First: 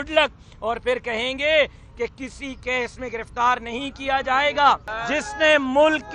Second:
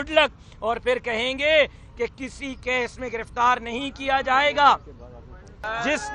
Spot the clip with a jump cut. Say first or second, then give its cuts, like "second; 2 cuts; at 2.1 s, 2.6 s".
first; 1 cut; at 4.9 s